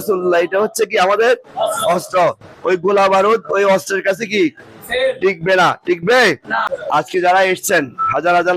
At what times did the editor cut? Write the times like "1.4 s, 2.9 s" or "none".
6.6 s